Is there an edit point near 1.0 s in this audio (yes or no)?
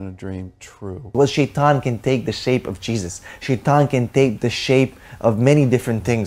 yes